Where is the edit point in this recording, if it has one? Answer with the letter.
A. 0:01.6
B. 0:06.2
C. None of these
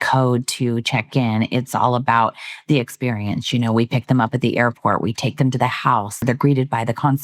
B